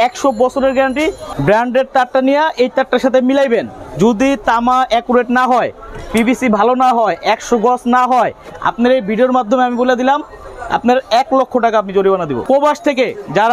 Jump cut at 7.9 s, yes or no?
no